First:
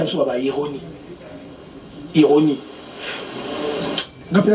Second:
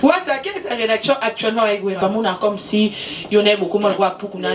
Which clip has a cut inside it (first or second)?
second